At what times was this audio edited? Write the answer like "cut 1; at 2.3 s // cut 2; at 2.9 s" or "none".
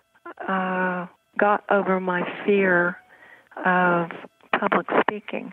cut 1; at 4.3 s